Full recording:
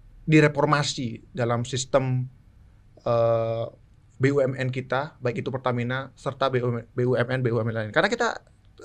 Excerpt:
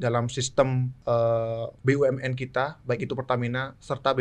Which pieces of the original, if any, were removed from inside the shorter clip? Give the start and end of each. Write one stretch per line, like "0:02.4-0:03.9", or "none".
0:02.3-0:02.9
0:03.7-0:04.1